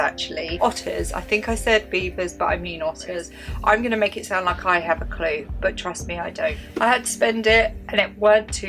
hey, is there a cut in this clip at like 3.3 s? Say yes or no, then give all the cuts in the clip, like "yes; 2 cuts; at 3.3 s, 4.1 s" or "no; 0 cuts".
yes; 2 cuts; at 3.3 s, 6.6 s